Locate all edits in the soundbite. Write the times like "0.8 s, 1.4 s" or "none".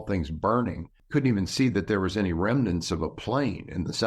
0.9 s